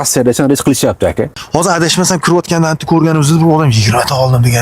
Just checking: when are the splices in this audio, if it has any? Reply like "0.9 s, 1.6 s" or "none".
1.4 s